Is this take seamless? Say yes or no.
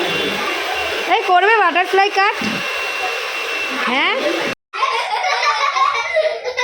no